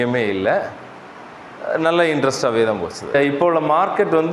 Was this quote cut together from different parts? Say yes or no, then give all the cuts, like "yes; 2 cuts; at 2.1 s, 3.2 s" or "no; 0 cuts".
yes; 1 cut; at 3.0 s